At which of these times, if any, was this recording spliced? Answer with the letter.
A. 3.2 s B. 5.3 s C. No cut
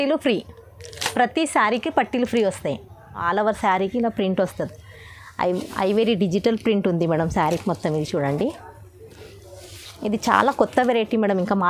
A